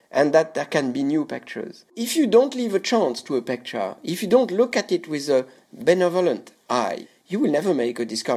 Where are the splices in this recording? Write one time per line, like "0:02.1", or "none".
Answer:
0:02.0
0:05.6
0:07.0